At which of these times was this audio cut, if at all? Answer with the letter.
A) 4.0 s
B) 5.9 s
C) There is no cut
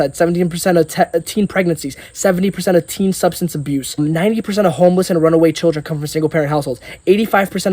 A